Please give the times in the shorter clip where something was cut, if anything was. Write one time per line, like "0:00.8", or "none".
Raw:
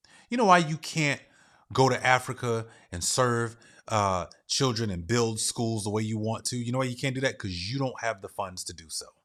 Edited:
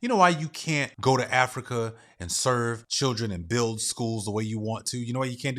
0:00.9
0:02.9